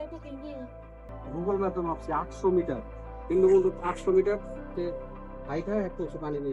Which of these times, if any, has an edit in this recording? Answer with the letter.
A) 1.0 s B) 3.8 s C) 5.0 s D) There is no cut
A